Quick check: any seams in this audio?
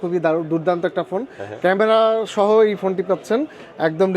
no; 0 cuts

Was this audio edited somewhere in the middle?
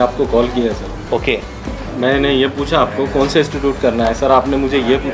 yes; 1 cut; at 1.7 s

